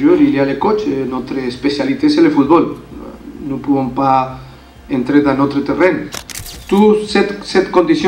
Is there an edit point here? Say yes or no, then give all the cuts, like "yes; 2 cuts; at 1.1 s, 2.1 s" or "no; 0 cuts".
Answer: yes; 1 cut; at 6.2 s